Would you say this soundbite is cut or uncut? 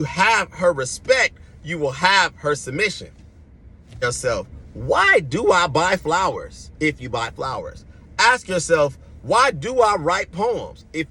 cut